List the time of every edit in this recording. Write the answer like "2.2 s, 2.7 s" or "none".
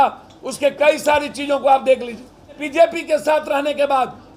2.6 s